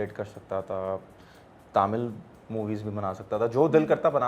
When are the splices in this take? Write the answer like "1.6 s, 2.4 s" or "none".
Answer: none